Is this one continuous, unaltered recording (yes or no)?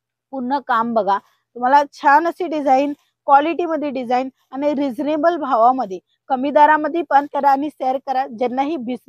no